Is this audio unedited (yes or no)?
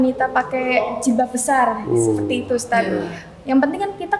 yes